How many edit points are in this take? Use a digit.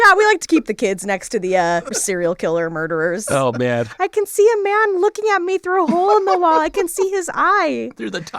2